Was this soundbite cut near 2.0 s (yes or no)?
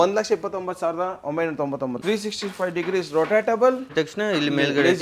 yes